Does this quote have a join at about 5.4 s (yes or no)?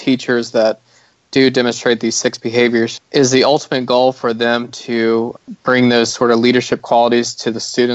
yes